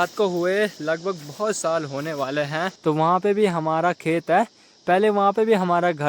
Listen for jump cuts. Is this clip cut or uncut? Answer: cut